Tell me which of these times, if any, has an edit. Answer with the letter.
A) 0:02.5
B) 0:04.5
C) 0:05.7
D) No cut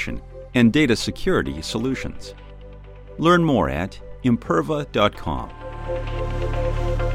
C